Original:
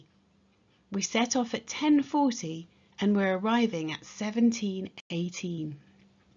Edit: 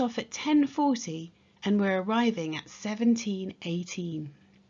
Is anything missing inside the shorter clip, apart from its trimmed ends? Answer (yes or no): yes